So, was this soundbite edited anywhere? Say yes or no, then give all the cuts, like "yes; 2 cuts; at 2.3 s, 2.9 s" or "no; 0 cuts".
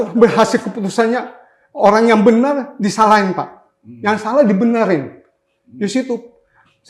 no; 0 cuts